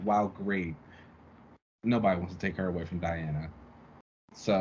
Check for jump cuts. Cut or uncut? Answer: uncut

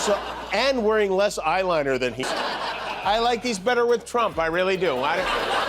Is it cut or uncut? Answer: uncut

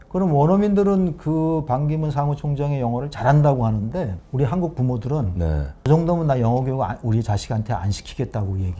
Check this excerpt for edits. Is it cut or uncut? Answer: cut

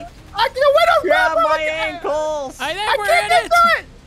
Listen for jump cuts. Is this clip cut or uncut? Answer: uncut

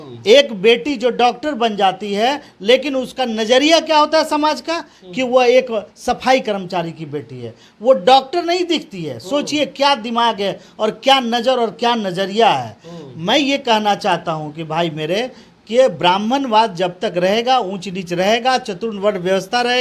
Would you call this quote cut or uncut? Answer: uncut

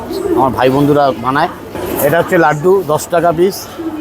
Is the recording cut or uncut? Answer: cut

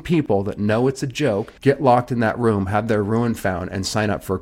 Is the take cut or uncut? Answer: cut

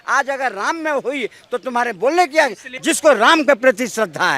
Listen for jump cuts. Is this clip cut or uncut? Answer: cut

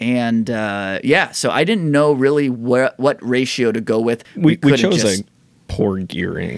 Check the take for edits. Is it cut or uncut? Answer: cut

